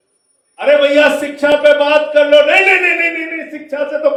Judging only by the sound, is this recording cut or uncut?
uncut